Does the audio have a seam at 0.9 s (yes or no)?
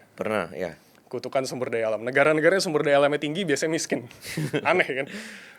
no